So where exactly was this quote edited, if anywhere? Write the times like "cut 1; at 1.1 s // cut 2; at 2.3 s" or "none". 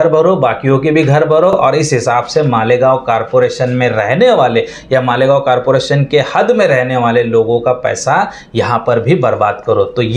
none